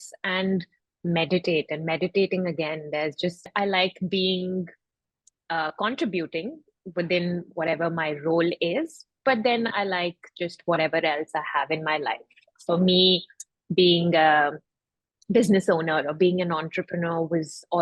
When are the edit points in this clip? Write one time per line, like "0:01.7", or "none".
0:03.4

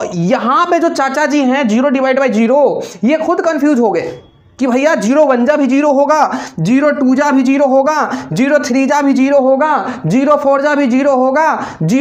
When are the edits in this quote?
none

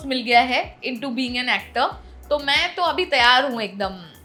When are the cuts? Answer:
none

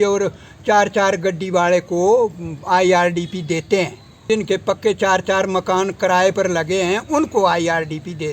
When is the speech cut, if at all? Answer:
0:04.2

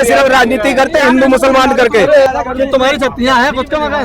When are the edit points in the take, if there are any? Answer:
0:02.3

